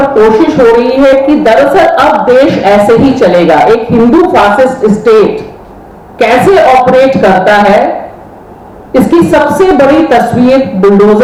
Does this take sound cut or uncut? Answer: uncut